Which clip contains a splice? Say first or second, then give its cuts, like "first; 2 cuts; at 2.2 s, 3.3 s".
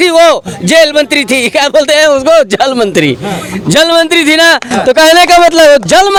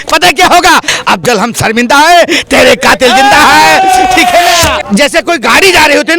second; 1 cut; at 4.8 s